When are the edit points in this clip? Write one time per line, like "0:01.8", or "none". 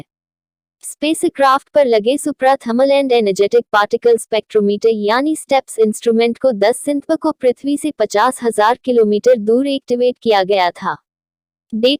none